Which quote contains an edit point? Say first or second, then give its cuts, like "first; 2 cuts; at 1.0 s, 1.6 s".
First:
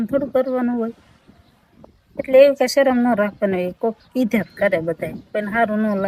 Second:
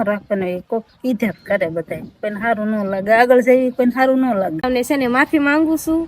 second; 1 cut; at 4.6 s